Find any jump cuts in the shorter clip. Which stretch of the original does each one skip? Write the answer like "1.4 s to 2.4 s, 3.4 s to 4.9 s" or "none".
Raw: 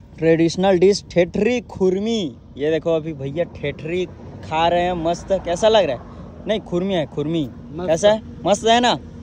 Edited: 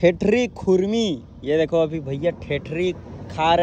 none